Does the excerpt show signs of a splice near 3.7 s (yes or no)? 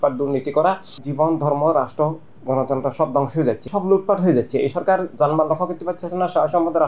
yes